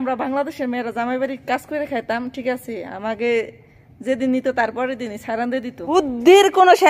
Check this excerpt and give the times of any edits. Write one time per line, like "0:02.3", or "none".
0:05.9

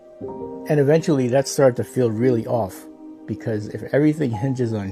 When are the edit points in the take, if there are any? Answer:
none

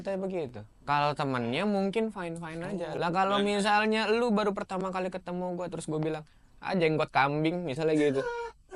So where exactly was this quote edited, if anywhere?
0:02.9

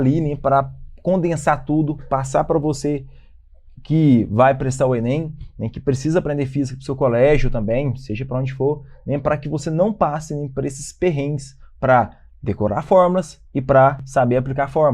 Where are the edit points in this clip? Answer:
0:14.0

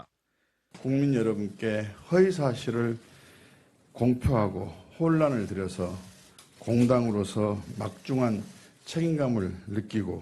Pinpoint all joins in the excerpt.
none

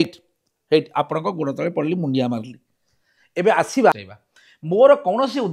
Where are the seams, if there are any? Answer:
0:03.9

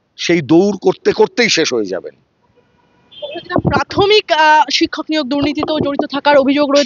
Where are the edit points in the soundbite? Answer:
none

